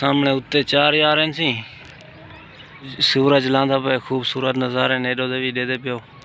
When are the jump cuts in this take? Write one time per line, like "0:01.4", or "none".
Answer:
0:03.0